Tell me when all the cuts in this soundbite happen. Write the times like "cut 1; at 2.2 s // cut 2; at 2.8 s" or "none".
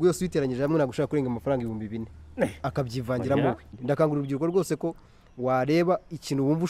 cut 1; at 3.7 s

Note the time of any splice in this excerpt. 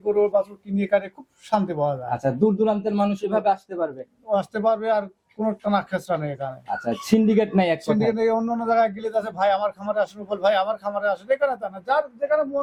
none

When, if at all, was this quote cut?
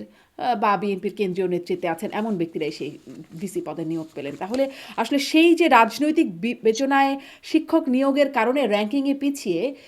none

